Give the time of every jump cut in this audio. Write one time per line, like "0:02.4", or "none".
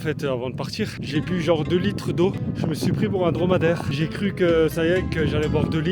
0:01.0
0:02.4
0:03.9

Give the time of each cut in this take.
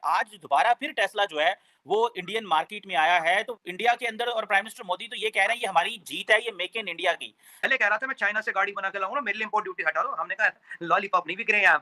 0:07.6

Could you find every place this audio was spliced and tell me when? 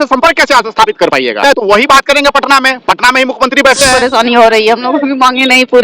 0:04.0

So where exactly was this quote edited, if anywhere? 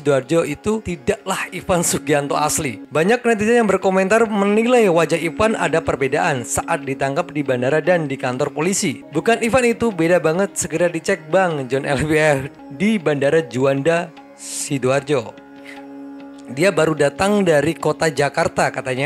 0:02.8
0:09.0
0:12.5

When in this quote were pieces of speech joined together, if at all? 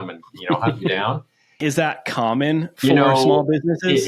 0:01.6

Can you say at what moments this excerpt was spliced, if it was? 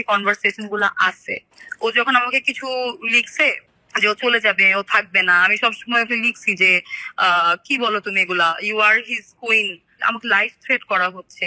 0:10.0

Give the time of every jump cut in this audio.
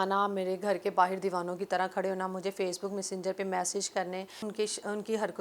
0:04.4

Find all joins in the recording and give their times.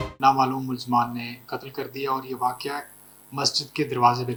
none

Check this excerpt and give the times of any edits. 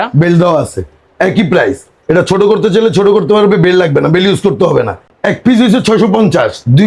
0:05.0

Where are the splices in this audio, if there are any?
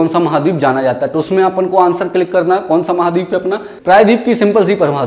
0:03.7

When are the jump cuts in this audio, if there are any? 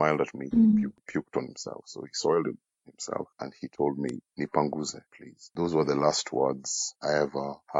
none

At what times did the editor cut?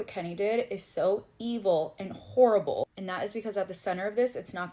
none

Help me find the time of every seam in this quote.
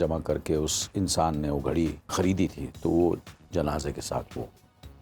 0:02.1

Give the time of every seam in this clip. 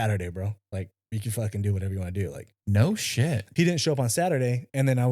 0:02.5
0:03.5

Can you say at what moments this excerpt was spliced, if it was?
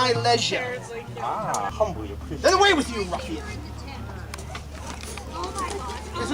0:01.7

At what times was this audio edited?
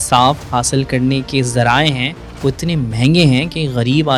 none

